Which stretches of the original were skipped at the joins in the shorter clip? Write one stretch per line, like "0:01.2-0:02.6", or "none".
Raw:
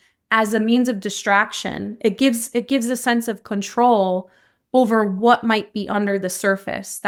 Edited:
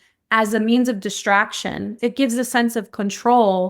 0:01.9-0:02.4

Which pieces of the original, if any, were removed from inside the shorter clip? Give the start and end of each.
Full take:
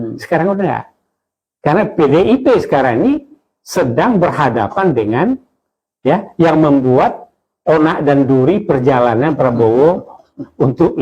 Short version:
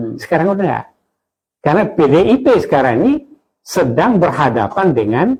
none

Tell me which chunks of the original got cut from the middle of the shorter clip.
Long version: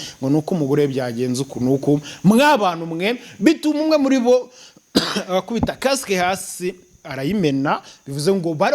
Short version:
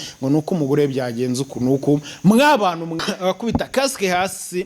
0:03.0-0:05.1

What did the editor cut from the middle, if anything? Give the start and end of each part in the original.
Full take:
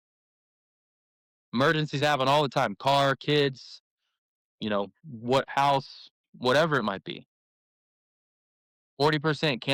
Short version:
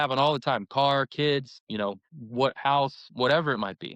0:03.7-0:04.5
0:05.9-0:06.3

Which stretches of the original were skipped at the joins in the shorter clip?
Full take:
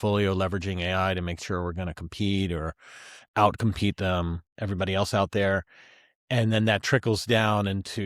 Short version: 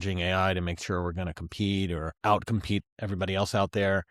0:02.7-0:03.2
0:04.0-0:04.5

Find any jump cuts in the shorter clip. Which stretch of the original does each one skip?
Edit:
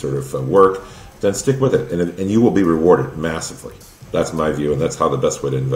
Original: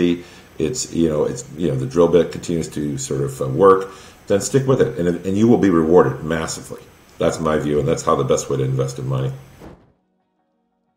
none

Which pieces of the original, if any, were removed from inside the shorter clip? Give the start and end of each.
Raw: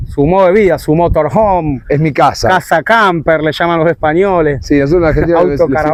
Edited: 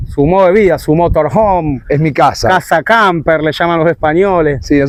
none

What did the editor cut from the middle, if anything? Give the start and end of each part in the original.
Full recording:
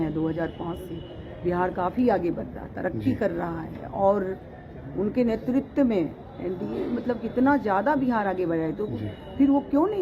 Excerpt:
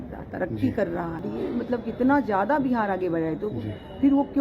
0:03.7-0:06.6

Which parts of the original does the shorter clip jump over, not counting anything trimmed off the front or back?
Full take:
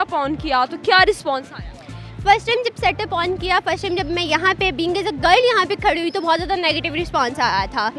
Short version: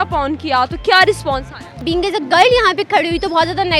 0:01.8-0:04.7

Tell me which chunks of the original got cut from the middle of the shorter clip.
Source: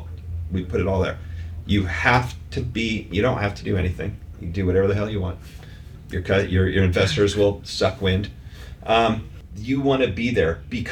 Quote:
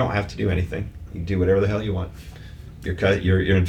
none

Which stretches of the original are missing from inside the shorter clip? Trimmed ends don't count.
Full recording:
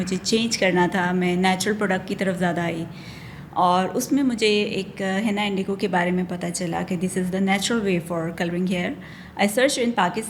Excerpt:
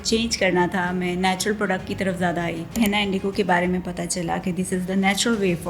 0:03.0-0:05.2

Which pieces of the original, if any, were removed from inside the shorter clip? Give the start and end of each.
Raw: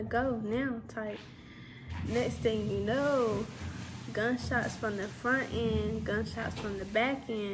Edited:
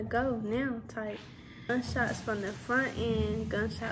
0:01.7-0:04.2

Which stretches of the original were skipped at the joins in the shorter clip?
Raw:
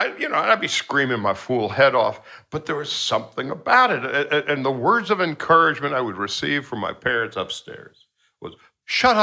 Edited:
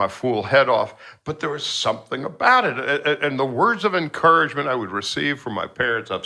none

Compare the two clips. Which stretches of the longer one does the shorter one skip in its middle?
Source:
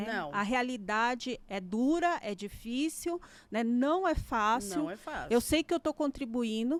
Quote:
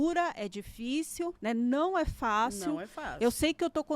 0:03.2-0:03.5

